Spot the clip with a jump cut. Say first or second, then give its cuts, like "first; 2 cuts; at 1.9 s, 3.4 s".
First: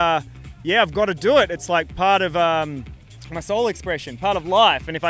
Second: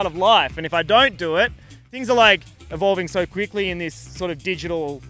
second; 1 cut; at 1.9 s